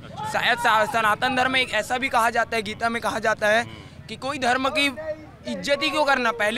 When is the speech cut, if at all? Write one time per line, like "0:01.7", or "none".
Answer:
none

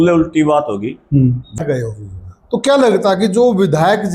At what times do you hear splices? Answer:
0:01.6

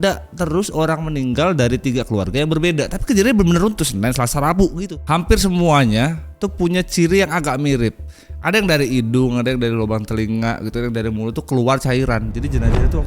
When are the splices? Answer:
0:04.9

